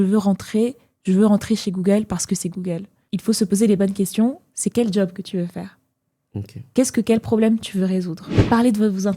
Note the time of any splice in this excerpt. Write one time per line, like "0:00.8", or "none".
0:02.9
0:08.3